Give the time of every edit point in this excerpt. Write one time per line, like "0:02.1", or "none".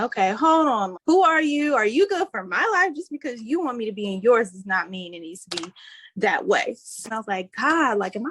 0:00.9
0:07.0